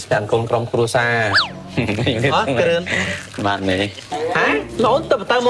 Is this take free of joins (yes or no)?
no